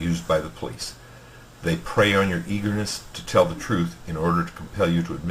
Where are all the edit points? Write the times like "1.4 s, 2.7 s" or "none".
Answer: 2.2 s